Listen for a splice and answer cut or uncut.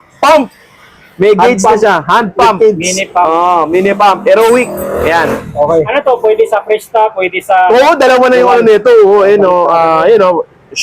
uncut